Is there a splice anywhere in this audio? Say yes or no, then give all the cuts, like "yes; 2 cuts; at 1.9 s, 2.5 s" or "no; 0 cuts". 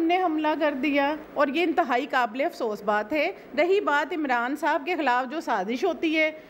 yes; 1 cut; at 1.2 s